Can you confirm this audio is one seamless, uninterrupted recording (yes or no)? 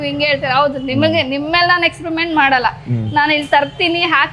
yes